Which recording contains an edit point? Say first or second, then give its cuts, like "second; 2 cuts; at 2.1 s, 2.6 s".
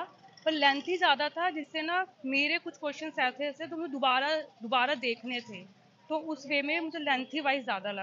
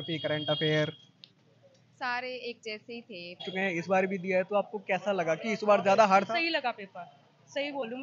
second; 1 cut; at 3.5 s